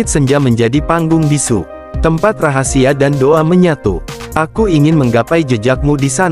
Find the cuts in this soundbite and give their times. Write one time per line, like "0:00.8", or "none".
0:01.8